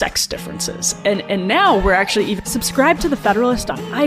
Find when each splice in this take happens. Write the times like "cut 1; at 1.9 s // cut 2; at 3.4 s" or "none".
cut 1; at 2.4 s